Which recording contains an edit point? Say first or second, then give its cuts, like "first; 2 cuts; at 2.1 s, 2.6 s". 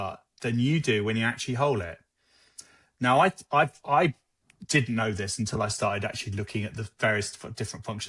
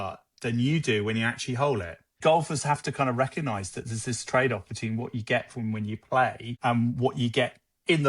second; 2 cuts; at 2.2 s, 6.5 s